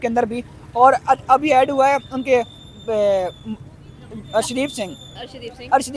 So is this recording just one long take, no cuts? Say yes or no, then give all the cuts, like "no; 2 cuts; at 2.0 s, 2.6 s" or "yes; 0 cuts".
yes; 0 cuts